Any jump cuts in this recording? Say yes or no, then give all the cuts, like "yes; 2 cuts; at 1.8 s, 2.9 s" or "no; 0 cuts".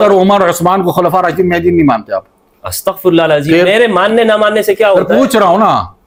no; 0 cuts